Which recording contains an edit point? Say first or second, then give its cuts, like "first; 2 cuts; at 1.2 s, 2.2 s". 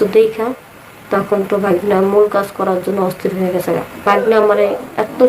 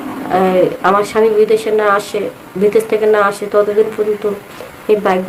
first; 1 cut; at 4.0 s